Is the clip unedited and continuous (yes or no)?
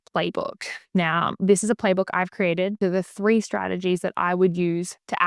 no